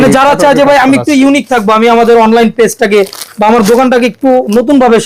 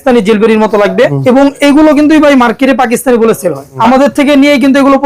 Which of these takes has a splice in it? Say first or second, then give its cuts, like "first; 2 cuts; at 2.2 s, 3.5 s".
second; 2 cuts; at 1.2 s, 3.7 s